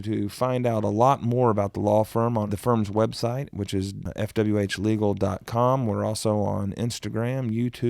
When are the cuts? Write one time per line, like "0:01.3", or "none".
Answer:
0:02.5
0:04.1